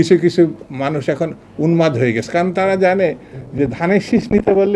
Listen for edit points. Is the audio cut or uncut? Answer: uncut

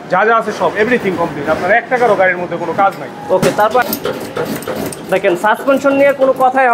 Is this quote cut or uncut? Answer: cut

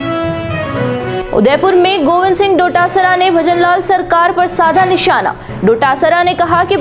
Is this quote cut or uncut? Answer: cut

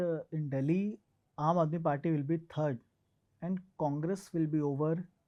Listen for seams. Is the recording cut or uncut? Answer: uncut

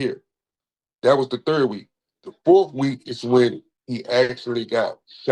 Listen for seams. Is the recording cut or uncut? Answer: uncut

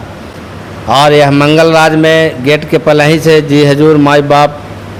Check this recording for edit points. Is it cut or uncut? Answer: uncut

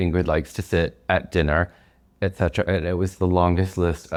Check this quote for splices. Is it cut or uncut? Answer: uncut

